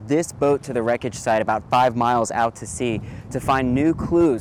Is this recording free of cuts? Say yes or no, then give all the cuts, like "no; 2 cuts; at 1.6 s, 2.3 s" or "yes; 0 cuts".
yes; 0 cuts